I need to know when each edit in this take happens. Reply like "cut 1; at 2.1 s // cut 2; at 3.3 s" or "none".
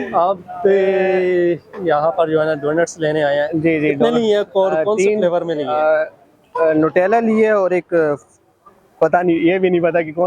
none